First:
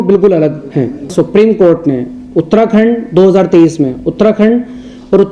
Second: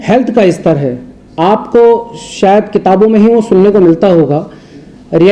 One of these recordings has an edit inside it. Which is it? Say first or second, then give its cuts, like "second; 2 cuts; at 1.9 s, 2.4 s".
first; 1 cut; at 1.1 s